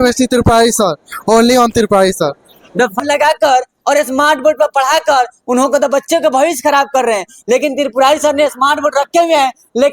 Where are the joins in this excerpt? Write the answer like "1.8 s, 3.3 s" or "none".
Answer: 3.0 s